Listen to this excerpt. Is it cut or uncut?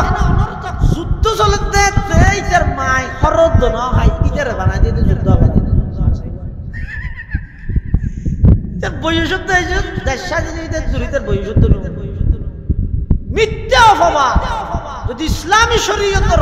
uncut